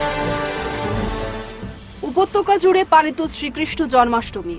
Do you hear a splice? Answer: no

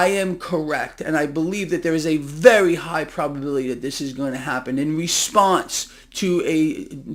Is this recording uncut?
yes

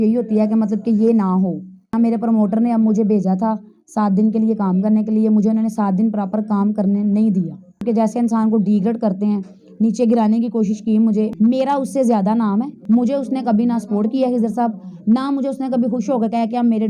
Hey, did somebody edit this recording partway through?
yes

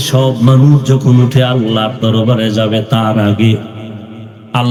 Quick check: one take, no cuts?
yes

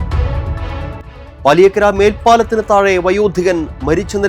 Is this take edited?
yes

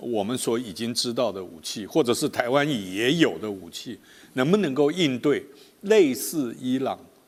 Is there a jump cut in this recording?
no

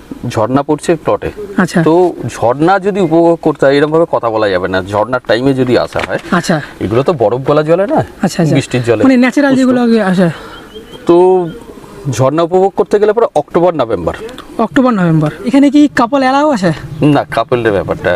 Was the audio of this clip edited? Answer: yes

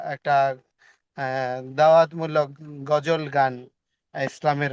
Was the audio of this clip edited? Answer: no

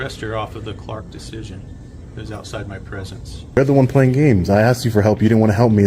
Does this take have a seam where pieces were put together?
yes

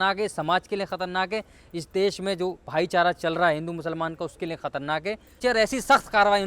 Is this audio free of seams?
no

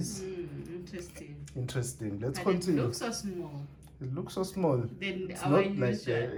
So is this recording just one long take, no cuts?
yes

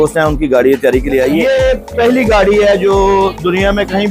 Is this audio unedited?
no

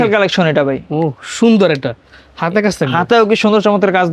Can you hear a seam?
no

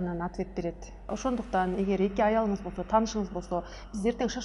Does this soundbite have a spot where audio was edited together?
yes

